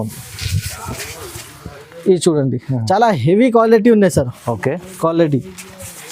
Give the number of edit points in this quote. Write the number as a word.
zero